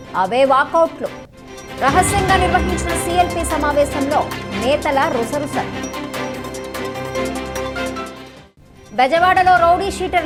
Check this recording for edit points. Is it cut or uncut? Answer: uncut